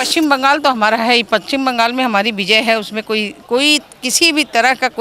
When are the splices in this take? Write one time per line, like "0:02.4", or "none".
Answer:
none